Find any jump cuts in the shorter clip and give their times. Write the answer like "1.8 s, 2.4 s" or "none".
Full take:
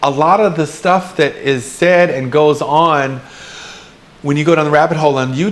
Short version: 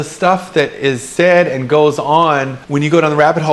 2.6 s